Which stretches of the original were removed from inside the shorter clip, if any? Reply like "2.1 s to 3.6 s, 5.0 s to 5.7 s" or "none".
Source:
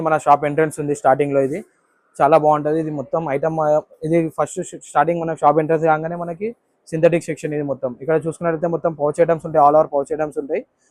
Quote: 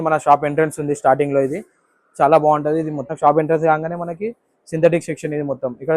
3.1 s to 5.3 s